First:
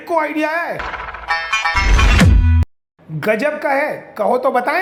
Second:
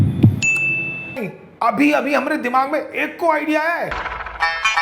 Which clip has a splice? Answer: second; 1 cut; at 1.2 s

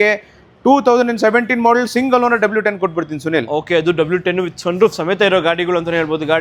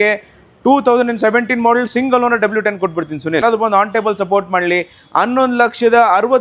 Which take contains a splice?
second; 1 cut; at 3.4 s

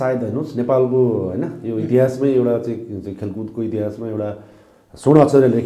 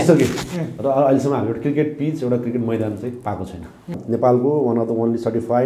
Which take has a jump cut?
second; 1 cut; at 4.0 s

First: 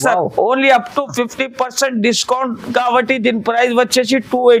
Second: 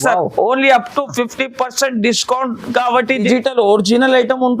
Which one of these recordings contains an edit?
second; 1 cut; at 3.2 s

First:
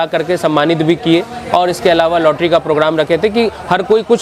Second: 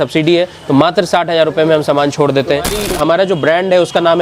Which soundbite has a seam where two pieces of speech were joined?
second; 1 cut; at 2.8 s

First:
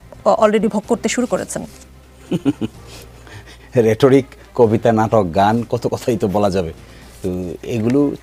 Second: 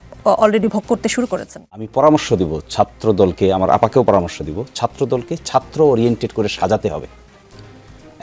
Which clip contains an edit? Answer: second; 1 cut; at 1.9 s

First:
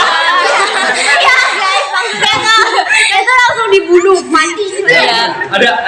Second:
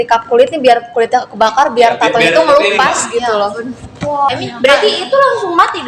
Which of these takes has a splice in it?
second; 1 cut; at 4.3 s

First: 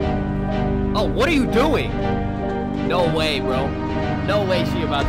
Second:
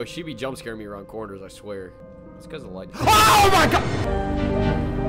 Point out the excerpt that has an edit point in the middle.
second; 2 cuts; at 2.1 s, 4.1 s

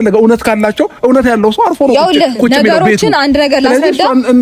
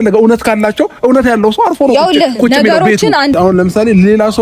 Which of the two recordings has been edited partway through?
second; 1 cut; at 3.4 s

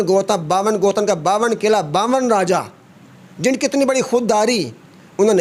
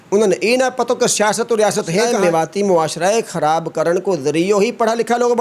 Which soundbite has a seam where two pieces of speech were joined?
second; 1 cut; at 2.1 s

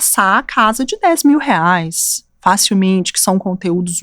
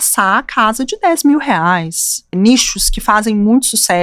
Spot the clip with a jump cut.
second; 1 cut; at 2.3 s

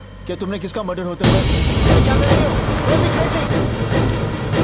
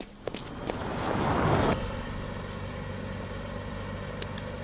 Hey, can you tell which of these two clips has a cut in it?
second; 1 cut; at 1.7 s

